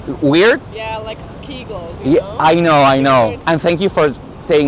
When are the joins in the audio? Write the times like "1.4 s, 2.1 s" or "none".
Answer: 3.4 s